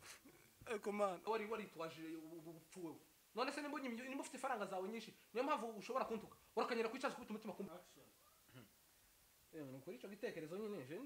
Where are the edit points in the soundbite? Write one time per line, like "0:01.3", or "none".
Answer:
0:01.2
0:07.7